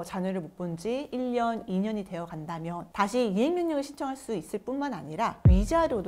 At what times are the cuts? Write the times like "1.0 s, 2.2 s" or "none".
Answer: none